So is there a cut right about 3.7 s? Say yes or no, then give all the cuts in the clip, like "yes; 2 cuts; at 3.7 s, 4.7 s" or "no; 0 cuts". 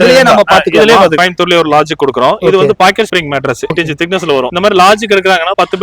yes; 2 cuts; at 1.1 s, 3.7 s